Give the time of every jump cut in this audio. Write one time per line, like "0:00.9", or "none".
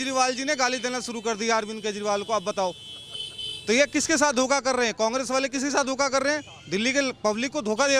none